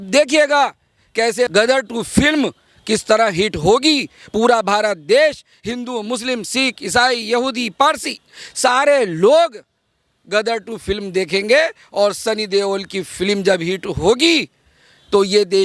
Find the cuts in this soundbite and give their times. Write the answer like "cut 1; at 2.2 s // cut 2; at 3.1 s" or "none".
none